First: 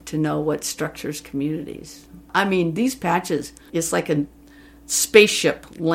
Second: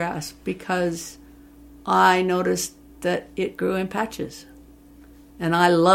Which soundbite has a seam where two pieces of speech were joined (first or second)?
first